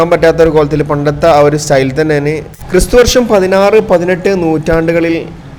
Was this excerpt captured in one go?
no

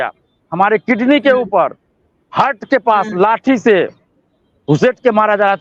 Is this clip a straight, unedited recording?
yes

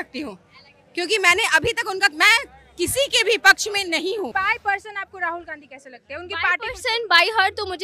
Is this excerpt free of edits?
no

